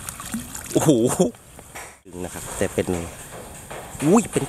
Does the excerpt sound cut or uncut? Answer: cut